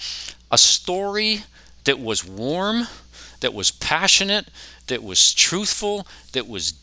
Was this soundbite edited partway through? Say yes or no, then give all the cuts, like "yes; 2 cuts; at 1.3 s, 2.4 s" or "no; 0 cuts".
no; 0 cuts